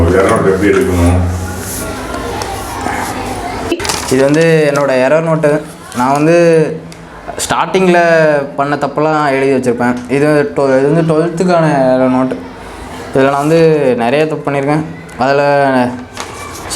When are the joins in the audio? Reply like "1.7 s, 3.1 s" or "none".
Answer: 3.8 s

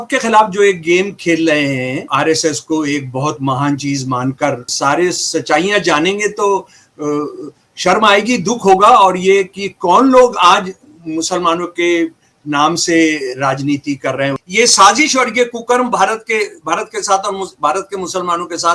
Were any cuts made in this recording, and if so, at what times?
2.0 s, 4.7 s, 14.4 s

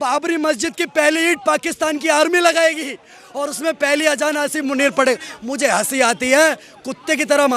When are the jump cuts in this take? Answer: none

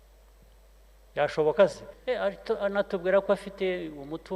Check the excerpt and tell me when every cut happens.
1.9 s

